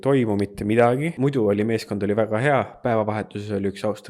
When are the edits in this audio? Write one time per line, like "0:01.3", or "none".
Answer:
0:01.1